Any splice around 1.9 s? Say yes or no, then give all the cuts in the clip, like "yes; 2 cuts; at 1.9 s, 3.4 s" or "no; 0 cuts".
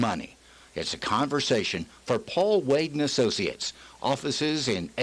no; 0 cuts